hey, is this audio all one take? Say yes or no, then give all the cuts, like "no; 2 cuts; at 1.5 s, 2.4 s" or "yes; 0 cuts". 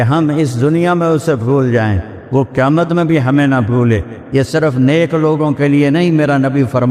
no; 1 cut; at 4.1 s